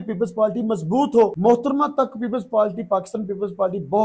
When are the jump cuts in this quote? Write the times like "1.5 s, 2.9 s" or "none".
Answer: 1.4 s